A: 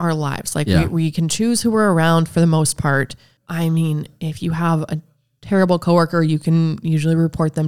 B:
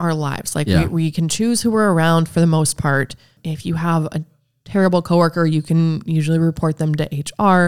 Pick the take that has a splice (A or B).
B